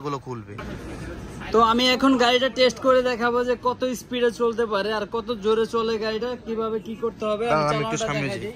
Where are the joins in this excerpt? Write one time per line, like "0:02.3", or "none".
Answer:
none